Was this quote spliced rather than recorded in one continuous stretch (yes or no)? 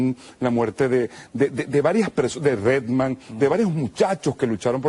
no